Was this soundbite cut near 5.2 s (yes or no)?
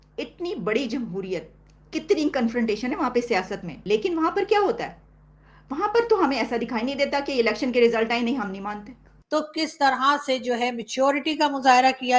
no